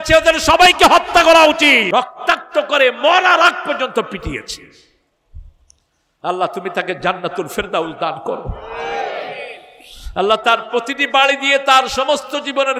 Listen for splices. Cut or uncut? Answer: cut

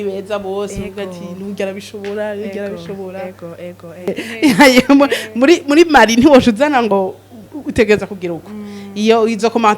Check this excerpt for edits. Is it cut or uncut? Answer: cut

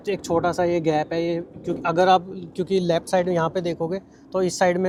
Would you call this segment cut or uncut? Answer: uncut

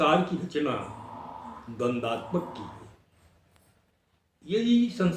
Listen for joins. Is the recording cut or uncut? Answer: cut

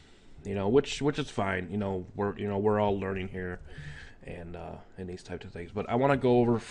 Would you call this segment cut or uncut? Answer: cut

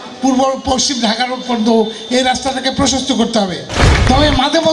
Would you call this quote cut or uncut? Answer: cut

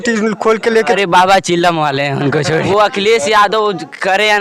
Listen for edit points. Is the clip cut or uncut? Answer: cut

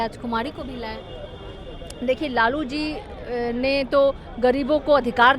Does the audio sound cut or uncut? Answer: uncut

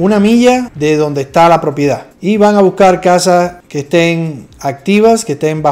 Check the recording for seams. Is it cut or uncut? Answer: uncut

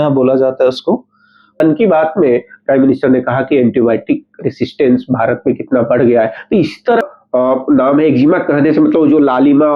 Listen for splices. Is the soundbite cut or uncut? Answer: cut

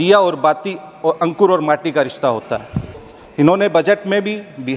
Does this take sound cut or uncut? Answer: cut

